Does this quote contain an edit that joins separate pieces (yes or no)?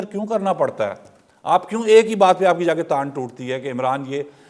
no